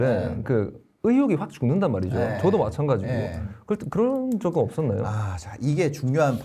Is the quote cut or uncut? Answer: uncut